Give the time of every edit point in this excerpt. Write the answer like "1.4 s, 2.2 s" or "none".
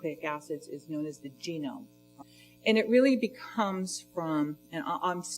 none